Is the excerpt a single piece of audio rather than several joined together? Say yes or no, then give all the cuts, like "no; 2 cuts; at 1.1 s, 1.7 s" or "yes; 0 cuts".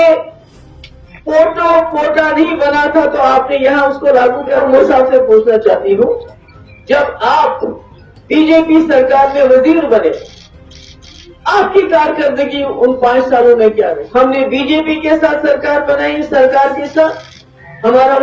no; 2 cuts; at 4.6 s, 14.0 s